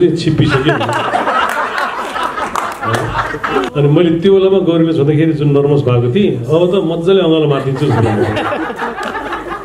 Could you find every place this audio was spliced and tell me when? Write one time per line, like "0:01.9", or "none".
0:03.7

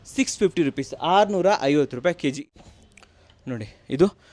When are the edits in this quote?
0:02.5

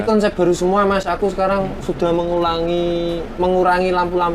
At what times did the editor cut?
none

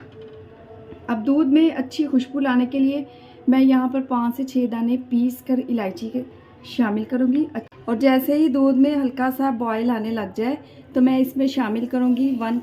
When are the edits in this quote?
0:07.6

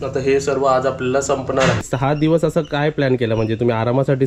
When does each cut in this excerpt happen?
0:01.9

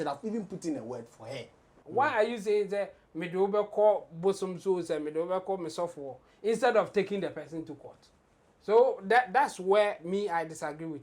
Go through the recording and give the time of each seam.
0:01.8

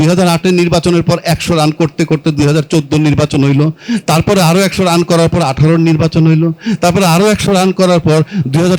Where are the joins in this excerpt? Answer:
none

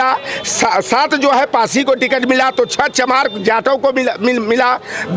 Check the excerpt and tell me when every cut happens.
none

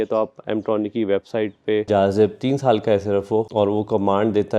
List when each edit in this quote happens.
0:01.9
0:03.5

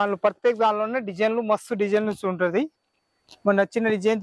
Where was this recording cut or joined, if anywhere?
none

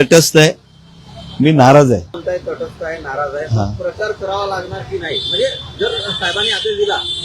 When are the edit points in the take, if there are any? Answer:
0:02.2

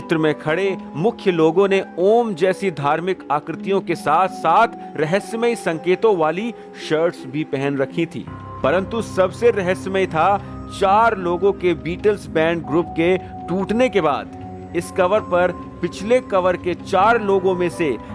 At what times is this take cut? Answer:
none

